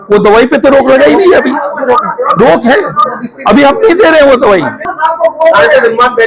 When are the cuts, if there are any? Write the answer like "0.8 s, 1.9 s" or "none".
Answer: 4.9 s